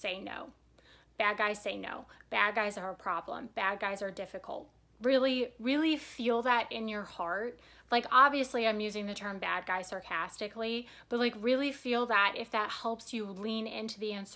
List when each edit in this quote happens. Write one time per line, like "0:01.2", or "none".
none